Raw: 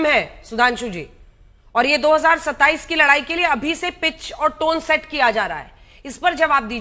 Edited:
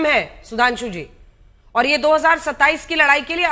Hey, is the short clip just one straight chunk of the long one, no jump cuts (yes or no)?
yes